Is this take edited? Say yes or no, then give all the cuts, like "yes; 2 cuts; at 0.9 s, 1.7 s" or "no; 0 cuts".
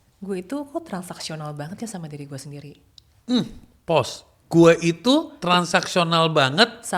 no; 0 cuts